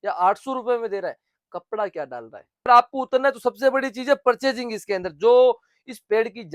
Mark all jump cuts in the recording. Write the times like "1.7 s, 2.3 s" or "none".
2.7 s